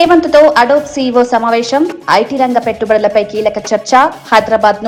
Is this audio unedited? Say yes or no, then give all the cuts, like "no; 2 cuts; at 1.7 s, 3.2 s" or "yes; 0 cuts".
yes; 0 cuts